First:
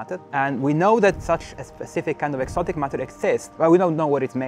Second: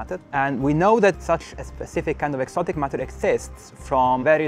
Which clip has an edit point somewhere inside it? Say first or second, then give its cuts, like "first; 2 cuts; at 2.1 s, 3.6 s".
first; 1 cut; at 3.5 s